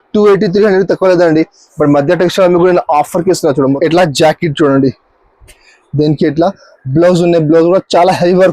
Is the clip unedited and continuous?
no; 1 cut; at 3.8 s

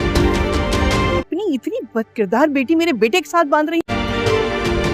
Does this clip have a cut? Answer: yes; 1 cut; at 1.1 s

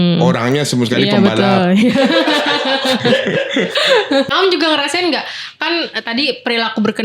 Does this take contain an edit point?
yes; 1 cut; at 4.3 s

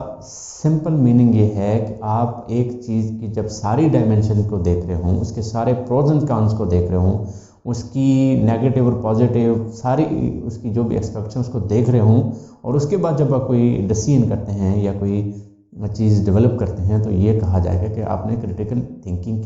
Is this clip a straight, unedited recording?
yes; 0 cuts

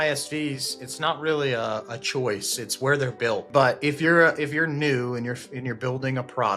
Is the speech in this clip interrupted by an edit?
yes; 1 cut; at 3.5 s

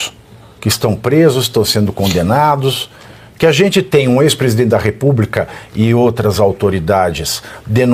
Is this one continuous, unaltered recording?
yes; 0 cuts

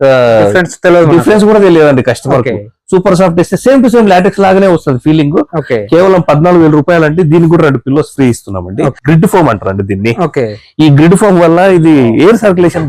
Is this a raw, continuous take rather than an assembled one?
no; 1 cut; at 9.0 s

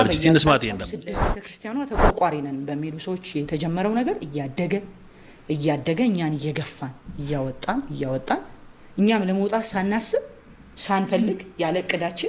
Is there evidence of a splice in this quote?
yes; 1 cut; at 1.1 s

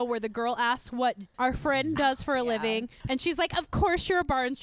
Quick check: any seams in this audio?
yes; 2 cuts; at 1.3 s, 2.9 s

